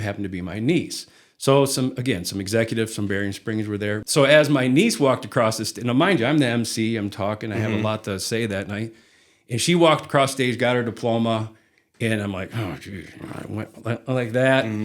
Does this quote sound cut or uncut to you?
cut